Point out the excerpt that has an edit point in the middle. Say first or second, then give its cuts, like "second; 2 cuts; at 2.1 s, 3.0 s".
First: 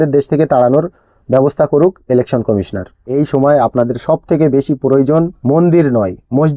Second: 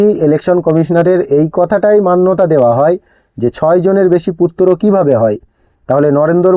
first; 1 cut; at 3.0 s